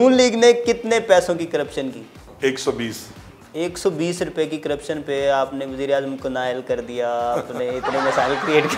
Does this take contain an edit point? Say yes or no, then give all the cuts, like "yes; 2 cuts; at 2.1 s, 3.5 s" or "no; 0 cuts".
no; 0 cuts